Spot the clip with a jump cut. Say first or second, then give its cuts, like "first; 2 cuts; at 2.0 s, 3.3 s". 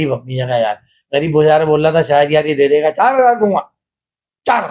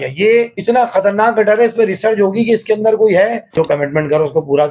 second; 1 cut; at 3.4 s